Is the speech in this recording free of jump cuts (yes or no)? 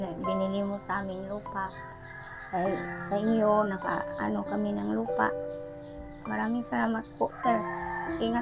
yes